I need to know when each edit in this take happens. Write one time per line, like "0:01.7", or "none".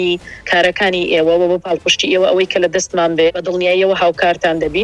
0:03.3